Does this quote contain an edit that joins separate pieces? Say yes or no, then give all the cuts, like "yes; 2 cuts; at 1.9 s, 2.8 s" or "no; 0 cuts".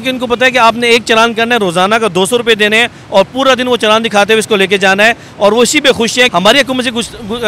yes; 1 cut; at 6.3 s